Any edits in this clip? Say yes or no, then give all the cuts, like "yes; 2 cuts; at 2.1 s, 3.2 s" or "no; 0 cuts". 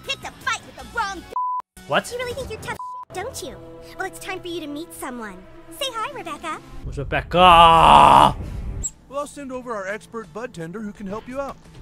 yes; 2 cuts; at 6.8 s, 8.9 s